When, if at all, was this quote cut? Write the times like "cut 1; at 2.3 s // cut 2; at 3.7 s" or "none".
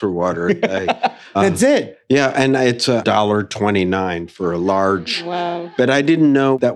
none

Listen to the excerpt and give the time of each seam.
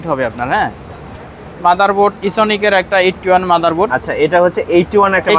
cut 1; at 1.2 s

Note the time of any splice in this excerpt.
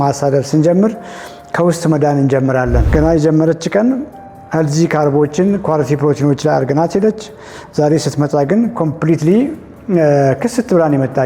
cut 1; at 2.8 s

